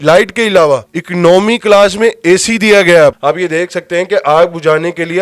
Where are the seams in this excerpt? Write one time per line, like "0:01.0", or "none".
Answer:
0:01.0
0:03.2